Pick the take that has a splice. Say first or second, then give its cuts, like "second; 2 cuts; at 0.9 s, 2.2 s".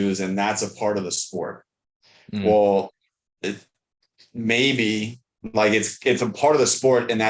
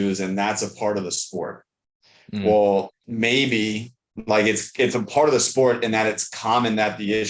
second; 1 cut; at 3.0 s